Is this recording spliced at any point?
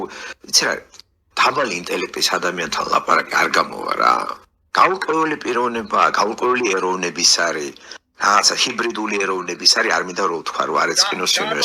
no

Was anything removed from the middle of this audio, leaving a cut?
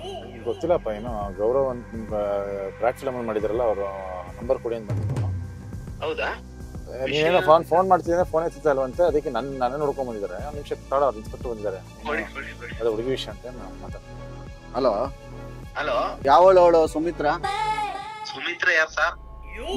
yes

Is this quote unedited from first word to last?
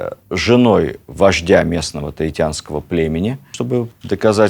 no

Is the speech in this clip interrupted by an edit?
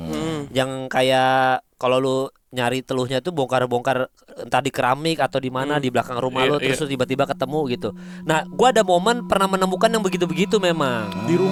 no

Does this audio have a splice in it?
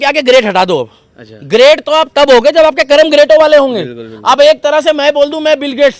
no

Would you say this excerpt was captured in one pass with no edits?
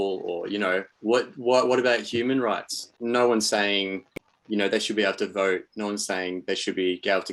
no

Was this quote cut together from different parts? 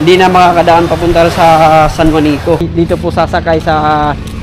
yes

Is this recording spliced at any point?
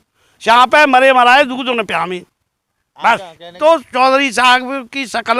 yes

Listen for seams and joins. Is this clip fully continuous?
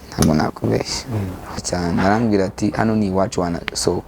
no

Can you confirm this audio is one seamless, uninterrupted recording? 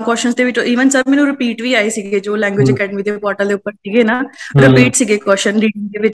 yes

